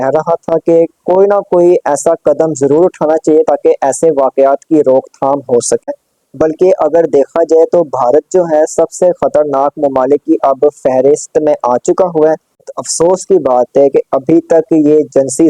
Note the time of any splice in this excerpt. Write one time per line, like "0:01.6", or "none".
0:05.9
0:12.8

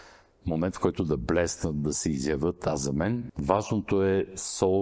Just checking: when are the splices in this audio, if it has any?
0:03.3

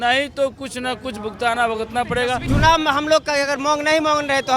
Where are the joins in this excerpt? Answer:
0:02.4

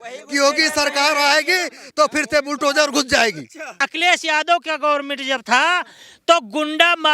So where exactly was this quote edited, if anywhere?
0:03.8

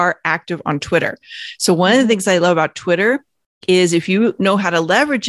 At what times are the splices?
none

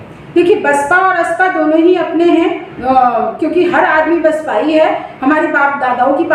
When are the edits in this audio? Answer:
none

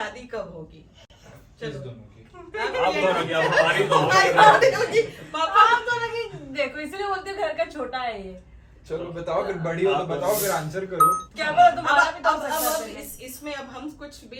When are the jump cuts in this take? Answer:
none

